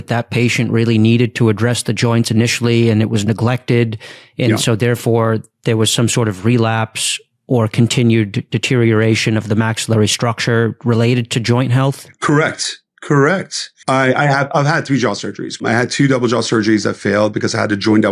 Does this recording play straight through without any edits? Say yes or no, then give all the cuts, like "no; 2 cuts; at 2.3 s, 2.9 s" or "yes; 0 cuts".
no; 3 cuts; at 12.1 s, 13.9 s, 15.6 s